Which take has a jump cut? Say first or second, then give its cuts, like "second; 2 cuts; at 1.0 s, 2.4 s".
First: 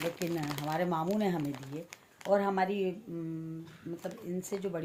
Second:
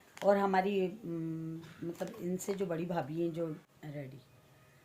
second; 1 cut; at 3.7 s